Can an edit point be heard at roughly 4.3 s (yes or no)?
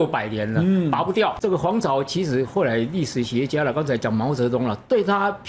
no